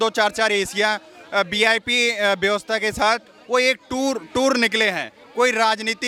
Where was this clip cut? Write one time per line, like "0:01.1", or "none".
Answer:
none